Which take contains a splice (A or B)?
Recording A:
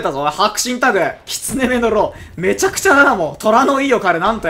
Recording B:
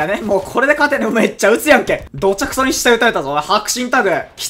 B